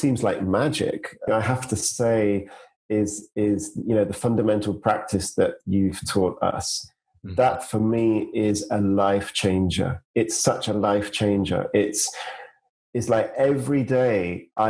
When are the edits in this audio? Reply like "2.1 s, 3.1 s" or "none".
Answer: 1.3 s